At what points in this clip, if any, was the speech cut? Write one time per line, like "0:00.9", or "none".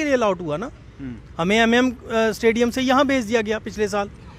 none